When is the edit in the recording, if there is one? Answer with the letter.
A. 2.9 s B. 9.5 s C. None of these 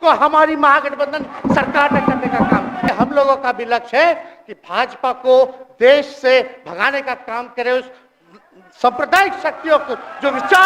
A